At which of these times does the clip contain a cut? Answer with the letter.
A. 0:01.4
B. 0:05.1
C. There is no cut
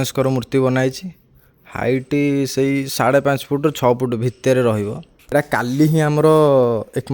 B